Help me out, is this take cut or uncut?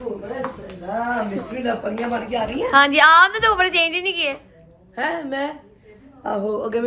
uncut